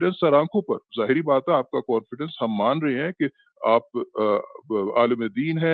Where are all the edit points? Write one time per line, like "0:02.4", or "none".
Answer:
none

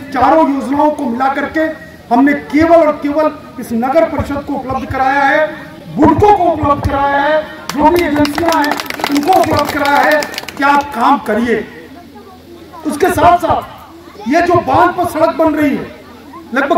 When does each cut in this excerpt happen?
none

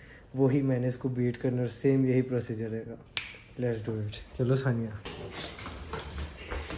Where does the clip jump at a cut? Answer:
0:05.1

